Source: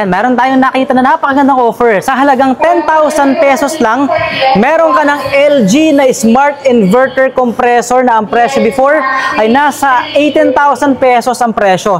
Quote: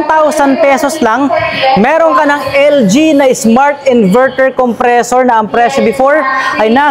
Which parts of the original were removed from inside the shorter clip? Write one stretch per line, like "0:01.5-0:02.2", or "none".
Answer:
none